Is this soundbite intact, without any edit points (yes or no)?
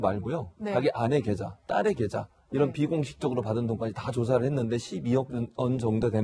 yes